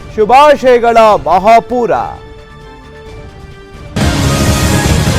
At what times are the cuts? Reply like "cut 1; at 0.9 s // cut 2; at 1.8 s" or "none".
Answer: cut 1; at 4.0 s